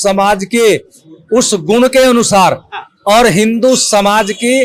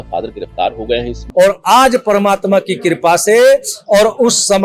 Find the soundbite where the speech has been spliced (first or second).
second